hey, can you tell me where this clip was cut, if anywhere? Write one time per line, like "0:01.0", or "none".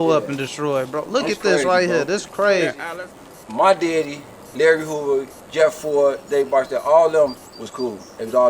0:02.8